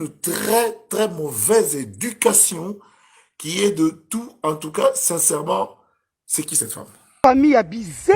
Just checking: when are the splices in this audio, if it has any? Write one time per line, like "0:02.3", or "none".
0:07.2